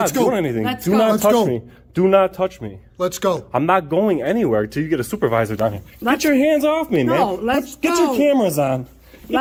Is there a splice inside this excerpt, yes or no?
no